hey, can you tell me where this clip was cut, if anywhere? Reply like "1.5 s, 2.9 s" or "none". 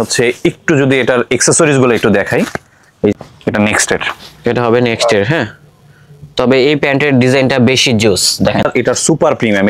3.1 s, 8.7 s